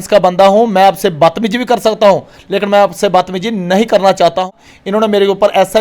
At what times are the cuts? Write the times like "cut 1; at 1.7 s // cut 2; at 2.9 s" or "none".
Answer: cut 1; at 4.5 s